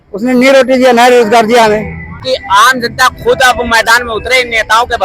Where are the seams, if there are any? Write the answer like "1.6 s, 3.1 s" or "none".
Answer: 2.2 s